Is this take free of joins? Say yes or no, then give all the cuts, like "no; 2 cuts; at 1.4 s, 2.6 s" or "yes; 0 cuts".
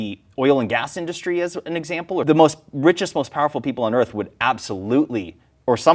no; 1 cut; at 2.2 s